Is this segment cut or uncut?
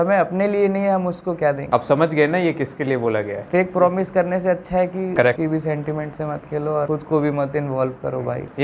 uncut